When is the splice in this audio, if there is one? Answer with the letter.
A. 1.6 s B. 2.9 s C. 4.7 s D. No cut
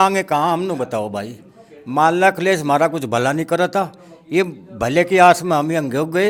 D